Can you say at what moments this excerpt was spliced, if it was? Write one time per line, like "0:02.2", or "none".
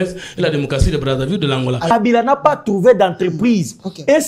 0:01.9

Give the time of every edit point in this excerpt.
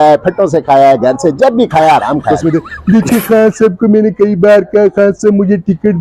0:02.3

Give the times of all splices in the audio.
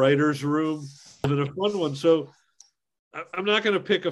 0:01.2
0:02.7

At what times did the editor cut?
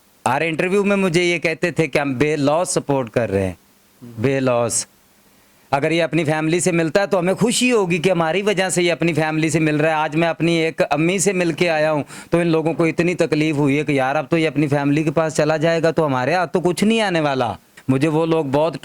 0:17.7

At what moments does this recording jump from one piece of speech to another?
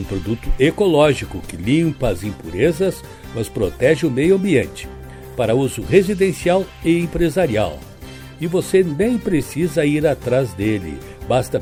none

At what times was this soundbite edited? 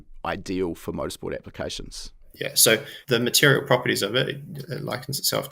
0:02.5

